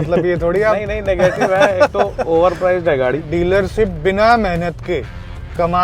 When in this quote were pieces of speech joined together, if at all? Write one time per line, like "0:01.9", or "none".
0:03.3